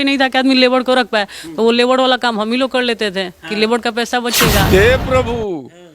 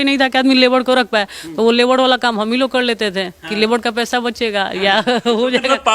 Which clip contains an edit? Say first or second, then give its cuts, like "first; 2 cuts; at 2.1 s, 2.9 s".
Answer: first; 1 cut; at 4.6 s